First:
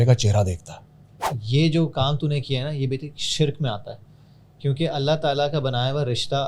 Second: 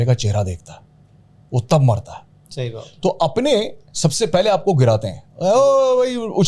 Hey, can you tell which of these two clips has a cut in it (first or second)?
first